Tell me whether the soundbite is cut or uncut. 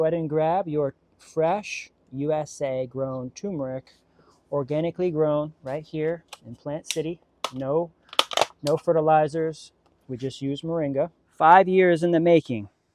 cut